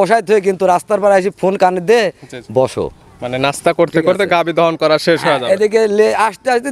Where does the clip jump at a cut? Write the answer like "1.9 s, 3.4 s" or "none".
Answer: none